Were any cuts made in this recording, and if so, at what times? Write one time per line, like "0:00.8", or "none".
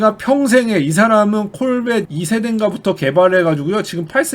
0:02.1